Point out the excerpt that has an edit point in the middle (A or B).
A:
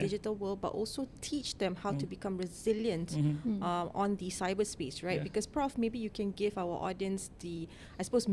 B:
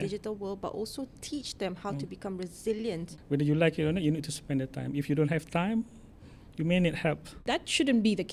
B